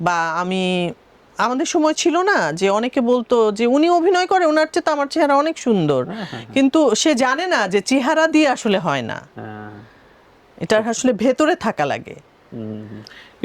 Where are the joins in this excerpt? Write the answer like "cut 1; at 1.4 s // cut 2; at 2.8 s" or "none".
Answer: none